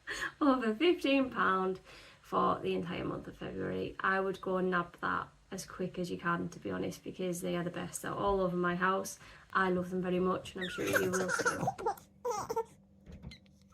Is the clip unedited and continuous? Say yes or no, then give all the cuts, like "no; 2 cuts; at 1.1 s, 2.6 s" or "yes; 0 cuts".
no; 1 cut; at 11.3 s